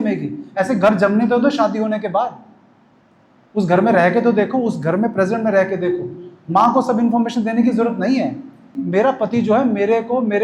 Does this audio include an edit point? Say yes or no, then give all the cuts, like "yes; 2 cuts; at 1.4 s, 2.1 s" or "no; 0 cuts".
yes; 1 cut; at 8.8 s